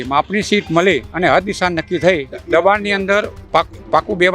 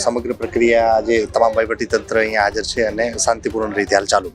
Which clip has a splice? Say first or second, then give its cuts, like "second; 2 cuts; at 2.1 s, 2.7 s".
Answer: first; 1 cut; at 2.4 s